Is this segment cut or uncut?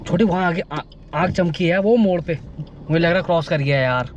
uncut